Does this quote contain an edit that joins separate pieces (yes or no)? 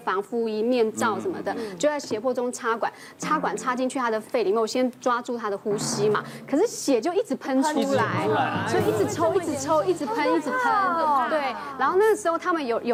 no